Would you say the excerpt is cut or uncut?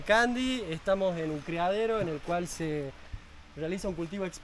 uncut